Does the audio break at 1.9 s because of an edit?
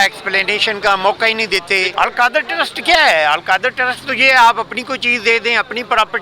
yes; 1 cut; at 1.9 s

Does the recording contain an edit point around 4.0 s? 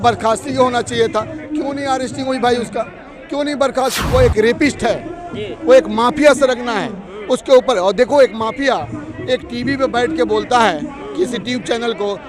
yes; 1 cut; at 4.0 s

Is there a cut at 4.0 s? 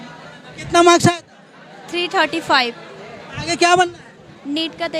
no; 0 cuts

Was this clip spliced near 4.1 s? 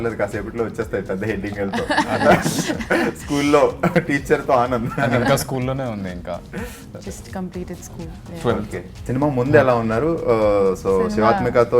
no; 1 cut; at 9.1 s

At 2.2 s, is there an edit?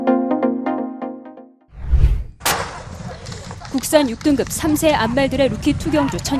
yes; 1 cut; at 2.2 s

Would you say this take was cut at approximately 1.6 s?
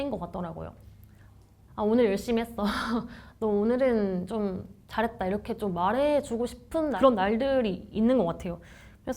yes; 1 cut; at 1.6 s

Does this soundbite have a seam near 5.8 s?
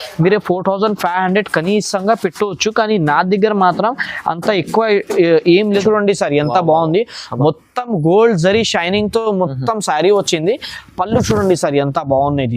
yes; 1 cut; at 5.8 s

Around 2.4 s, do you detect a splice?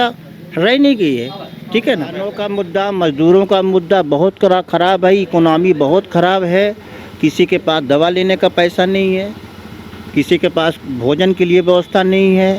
yes; 1 cut; at 2.4 s

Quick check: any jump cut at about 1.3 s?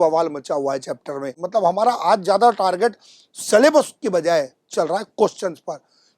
yes; 1 cut; at 1.3 s

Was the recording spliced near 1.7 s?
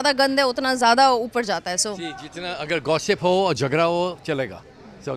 no; 0 cuts

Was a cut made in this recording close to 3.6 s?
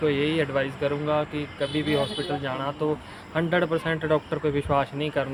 no; 0 cuts

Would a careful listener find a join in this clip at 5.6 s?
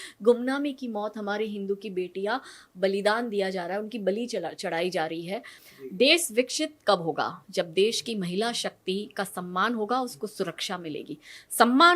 yes; 1 cut; at 5.6 s

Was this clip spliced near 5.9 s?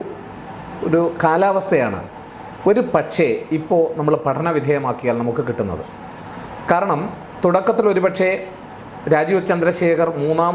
no; 0 cuts

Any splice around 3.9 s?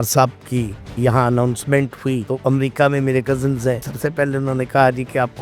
yes; 2 cuts; at 2.2 s, 3.9 s

